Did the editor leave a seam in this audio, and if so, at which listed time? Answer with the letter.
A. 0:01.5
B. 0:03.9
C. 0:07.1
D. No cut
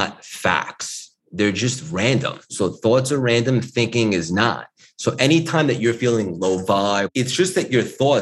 C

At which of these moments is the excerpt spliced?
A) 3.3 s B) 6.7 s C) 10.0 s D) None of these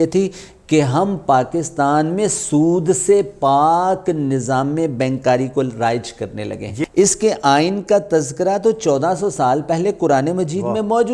B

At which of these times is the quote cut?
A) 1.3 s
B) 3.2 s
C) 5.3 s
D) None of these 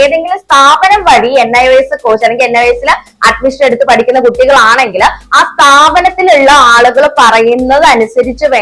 D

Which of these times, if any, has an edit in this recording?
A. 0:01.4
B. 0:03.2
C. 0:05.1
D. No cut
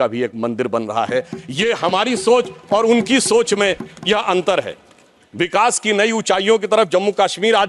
D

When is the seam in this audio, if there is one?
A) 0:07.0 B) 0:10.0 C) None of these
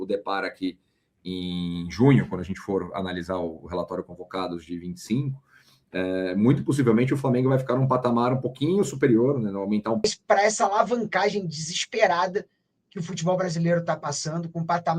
B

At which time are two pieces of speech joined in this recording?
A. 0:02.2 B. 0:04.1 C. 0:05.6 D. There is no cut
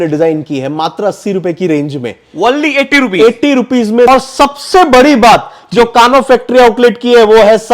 B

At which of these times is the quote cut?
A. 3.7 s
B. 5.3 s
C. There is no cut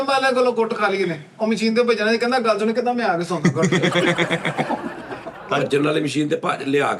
B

